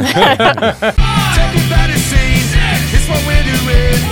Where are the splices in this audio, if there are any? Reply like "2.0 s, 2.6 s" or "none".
1.0 s